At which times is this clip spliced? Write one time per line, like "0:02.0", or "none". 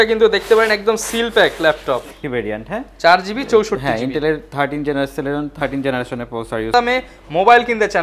0:02.2
0:06.7